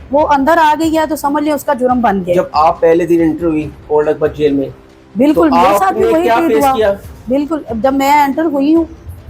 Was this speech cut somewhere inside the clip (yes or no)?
no